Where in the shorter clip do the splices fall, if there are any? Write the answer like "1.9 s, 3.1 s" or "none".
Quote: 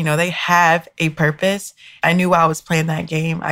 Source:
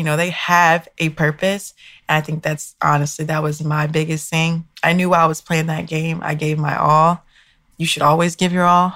1.9 s